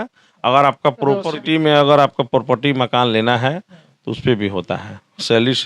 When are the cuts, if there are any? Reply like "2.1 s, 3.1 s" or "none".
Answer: 1.3 s